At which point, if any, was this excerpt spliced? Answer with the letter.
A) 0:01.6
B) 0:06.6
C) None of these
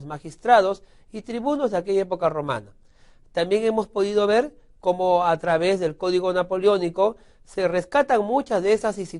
B